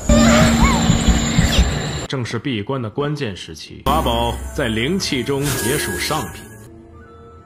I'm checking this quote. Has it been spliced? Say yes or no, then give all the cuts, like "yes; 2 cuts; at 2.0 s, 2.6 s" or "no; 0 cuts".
yes; 1 cut; at 2.0 s